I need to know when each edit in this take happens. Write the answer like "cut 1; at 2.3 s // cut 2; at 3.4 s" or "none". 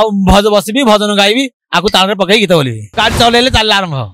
cut 1; at 2.9 s